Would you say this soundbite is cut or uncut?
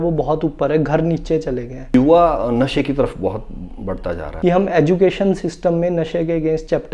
cut